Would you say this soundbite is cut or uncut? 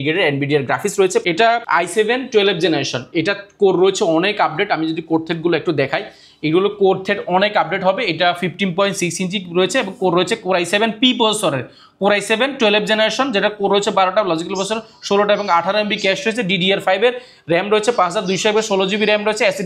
cut